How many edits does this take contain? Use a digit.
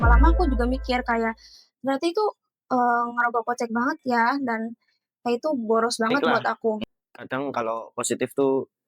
1